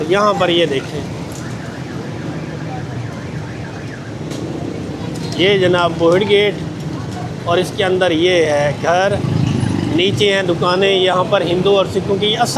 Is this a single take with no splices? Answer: yes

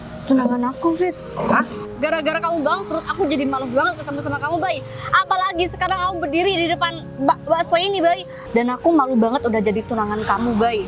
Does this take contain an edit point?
yes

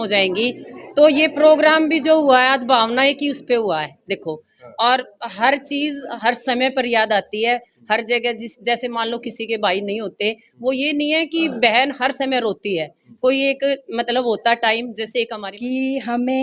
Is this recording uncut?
no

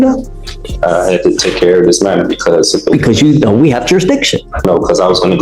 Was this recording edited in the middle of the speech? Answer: no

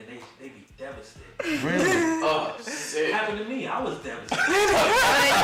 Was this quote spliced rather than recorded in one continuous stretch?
no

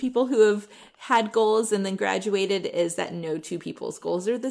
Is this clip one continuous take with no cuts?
yes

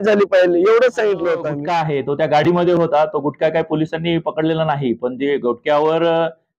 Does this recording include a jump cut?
yes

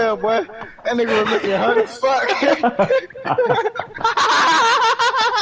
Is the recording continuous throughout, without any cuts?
yes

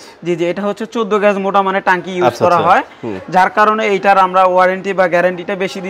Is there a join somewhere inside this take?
no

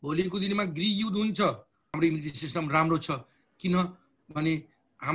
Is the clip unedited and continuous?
no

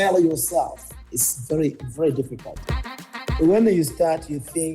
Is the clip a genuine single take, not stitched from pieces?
no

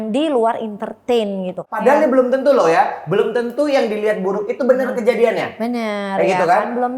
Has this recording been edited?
yes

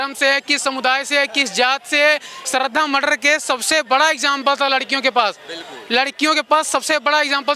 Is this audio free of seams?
no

